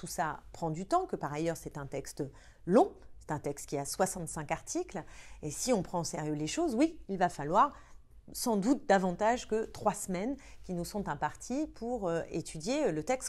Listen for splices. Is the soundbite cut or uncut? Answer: uncut